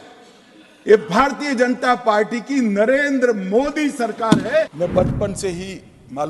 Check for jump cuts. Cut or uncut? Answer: cut